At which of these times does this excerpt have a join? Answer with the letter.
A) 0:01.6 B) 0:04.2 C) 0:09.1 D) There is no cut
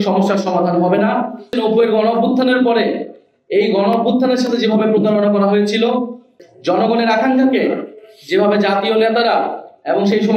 A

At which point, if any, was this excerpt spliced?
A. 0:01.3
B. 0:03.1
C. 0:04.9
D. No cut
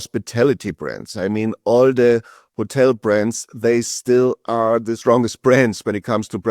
C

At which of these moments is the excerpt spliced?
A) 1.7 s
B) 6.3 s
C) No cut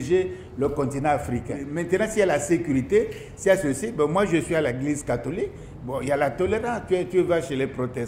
A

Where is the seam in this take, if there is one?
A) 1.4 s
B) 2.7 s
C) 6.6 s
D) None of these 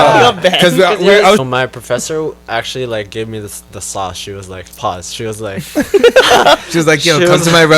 A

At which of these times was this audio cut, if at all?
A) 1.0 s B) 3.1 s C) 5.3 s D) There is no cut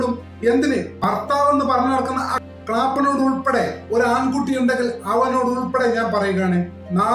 A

